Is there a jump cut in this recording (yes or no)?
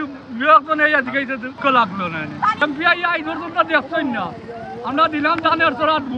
yes